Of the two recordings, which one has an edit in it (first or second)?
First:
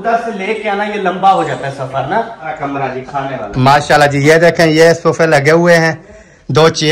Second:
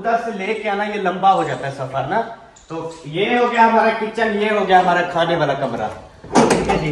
first